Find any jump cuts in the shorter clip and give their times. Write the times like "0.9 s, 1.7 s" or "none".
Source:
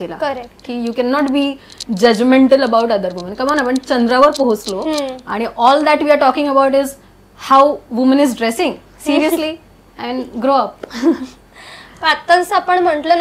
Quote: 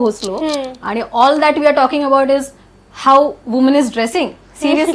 none